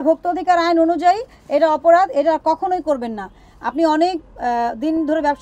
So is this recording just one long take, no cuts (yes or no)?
yes